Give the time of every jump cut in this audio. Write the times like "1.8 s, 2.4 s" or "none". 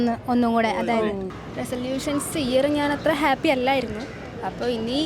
1.4 s